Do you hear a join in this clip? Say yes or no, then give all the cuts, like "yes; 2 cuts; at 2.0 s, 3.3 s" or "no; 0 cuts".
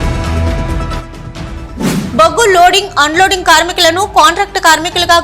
yes; 1 cut; at 1.1 s